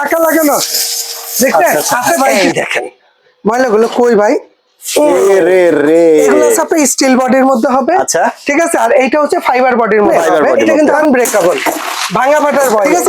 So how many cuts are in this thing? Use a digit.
3